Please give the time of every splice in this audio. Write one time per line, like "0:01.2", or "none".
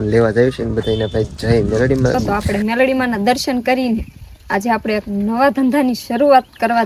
0:02.3